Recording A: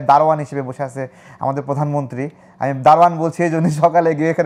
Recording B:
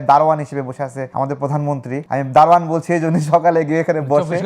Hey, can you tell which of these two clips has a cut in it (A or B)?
B